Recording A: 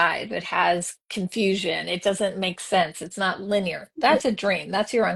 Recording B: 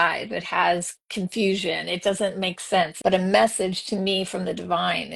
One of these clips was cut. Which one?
B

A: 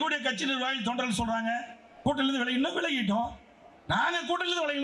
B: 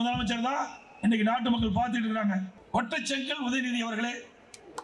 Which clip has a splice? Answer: B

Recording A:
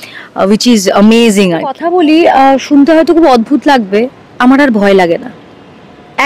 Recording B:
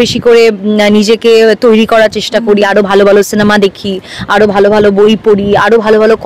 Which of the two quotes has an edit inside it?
A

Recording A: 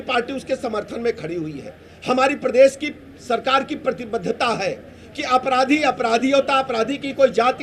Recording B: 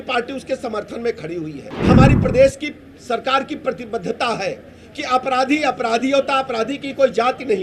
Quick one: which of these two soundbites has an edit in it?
B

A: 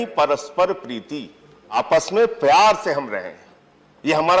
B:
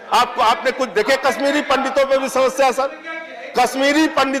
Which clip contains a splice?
A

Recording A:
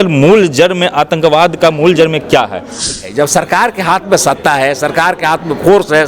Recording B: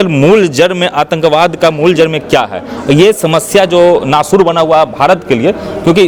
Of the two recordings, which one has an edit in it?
A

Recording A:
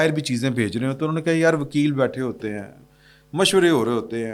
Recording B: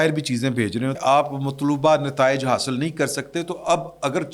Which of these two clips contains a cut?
B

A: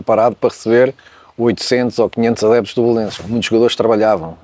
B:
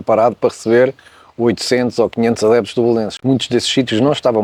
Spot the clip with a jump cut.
A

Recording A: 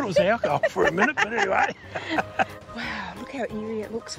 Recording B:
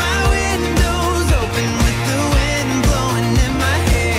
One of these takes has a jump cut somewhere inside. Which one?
A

